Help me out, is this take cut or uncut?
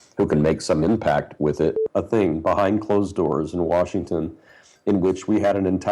cut